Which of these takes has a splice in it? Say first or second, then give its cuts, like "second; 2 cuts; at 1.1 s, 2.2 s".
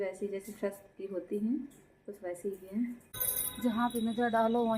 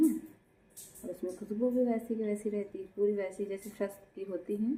first; 1 cut; at 3.1 s